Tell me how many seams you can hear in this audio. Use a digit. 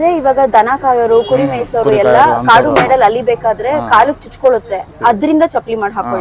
1